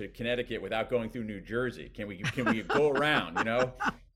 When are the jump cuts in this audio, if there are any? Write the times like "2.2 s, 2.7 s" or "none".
none